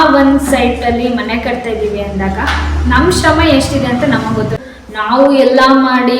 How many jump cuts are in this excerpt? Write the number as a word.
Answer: one